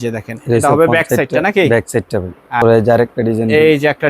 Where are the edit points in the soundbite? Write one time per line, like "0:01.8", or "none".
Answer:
0:02.6